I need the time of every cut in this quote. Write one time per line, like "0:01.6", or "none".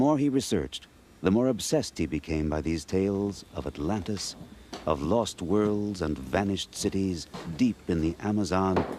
none